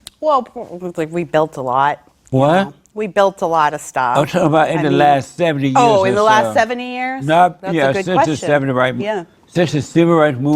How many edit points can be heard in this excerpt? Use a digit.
1